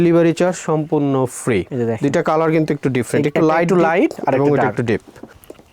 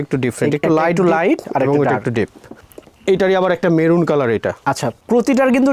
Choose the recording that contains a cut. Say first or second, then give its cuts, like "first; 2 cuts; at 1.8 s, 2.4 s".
first; 1 cut; at 1.7 s